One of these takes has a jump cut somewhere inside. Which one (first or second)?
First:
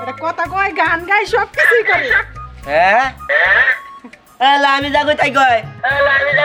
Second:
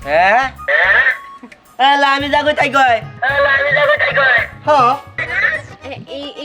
second